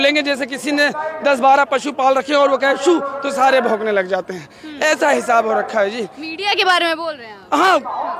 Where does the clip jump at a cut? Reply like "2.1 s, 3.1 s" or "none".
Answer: none